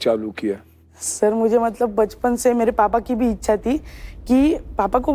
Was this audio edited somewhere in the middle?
no; 0 cuts

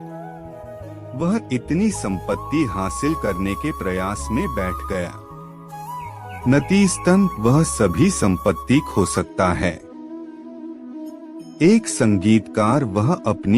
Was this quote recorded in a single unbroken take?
no; 1 cut; at 1.1 s

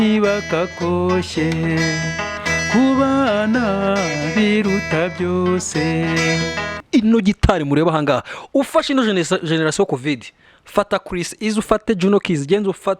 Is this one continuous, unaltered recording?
no; 1 cut; at 6.8 s

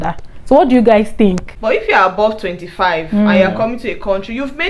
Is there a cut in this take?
yes; 1 cut; at 1.5 s

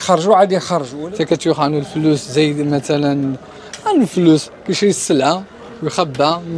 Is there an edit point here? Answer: yes; 1 cut; at 0.9 s

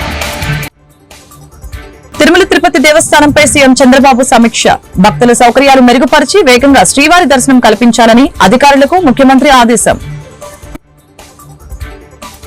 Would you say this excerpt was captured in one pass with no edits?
no; 2 cuts; at 2.2 s, 10.0 s

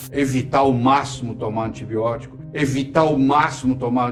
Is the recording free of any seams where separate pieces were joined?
yes; 0 cuts

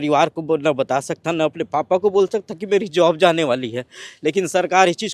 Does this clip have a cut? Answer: no; 0 cuts

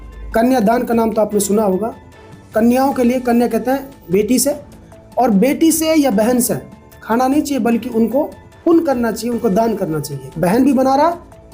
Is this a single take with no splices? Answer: no; 1 cut; at 10.3 s

